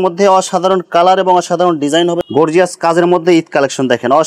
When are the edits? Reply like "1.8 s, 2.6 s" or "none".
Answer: 2.2 s